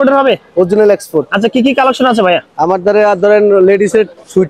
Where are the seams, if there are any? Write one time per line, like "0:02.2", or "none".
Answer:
none